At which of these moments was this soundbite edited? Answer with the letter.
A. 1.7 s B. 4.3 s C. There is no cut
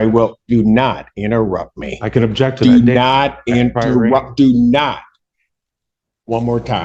C